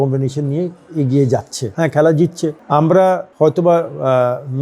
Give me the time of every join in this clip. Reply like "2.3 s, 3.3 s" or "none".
1.6 s, 2.6 s, 3.3 s